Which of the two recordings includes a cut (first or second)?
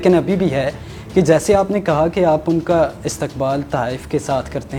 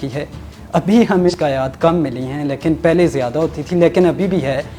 second